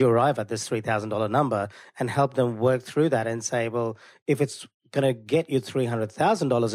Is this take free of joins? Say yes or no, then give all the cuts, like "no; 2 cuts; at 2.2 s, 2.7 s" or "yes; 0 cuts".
yes; 0 cuts